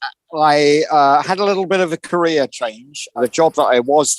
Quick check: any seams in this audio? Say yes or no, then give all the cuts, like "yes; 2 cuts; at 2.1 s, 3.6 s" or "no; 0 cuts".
yes; 1 cut; at 3.2 s